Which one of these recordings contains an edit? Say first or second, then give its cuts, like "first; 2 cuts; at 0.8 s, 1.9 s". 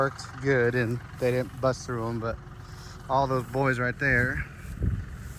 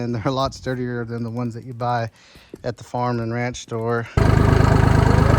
second; 1 cut; at 4.1 s